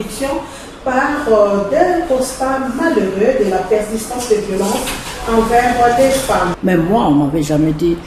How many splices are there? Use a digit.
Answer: 1